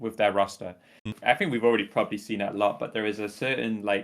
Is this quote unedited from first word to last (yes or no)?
no